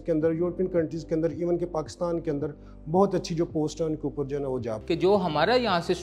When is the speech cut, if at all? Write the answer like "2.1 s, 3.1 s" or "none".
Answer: 4.7 s